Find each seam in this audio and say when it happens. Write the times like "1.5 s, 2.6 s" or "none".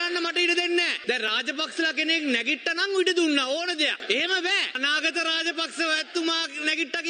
1.0 s, 4.7 s